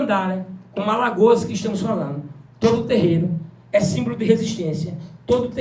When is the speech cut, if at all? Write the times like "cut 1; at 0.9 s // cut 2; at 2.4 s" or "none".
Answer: none

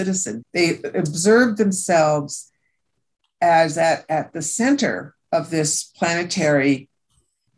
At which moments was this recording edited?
none

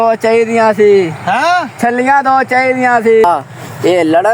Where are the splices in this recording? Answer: cut 1; at 3.2 s

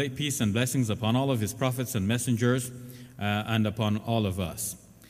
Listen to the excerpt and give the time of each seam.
none

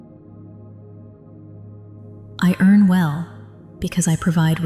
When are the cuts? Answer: cut 1; at 2.4 s

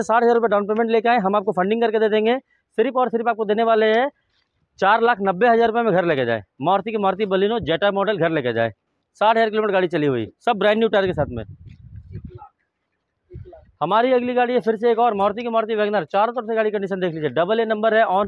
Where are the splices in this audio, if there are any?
none

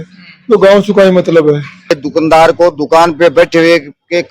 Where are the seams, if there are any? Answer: cut 1; at 2.0 s

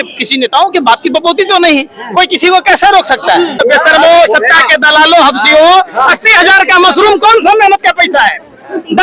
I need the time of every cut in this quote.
cut 1; at 3.6 s

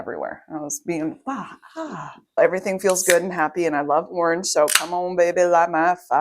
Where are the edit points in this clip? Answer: cut 1; at 2.4 s

